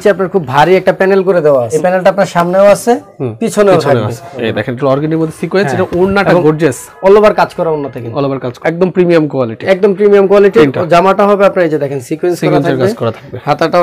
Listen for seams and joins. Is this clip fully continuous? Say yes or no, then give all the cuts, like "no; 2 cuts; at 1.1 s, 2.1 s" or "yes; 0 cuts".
no; 3 cuts; at 1.7 s, 4.3 s, 8.5 s